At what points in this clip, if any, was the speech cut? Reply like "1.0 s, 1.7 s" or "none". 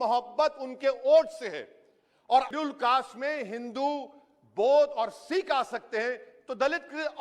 2.5 s